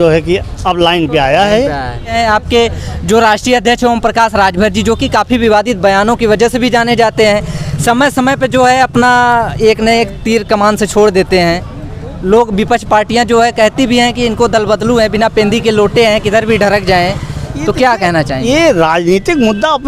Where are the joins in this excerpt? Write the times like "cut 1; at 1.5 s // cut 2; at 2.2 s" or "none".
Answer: cut 1; at 2.1 s